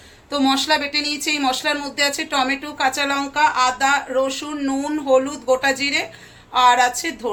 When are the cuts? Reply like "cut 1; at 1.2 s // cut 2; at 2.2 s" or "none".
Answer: none